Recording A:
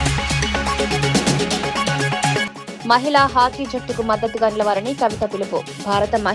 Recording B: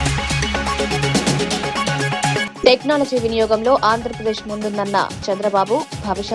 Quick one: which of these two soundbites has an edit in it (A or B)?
A